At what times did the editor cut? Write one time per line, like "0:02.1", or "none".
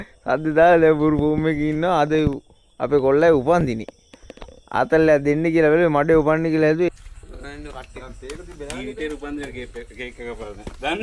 0:06.9